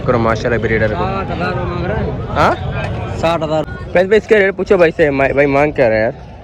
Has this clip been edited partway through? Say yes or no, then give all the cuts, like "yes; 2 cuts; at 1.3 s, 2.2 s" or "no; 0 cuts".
yes; 1 cut; at 3.7 s